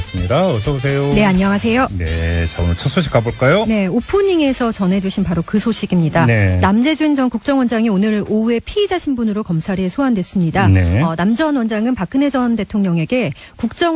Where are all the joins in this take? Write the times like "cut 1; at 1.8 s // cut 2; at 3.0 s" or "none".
cut 1; at 10.1 s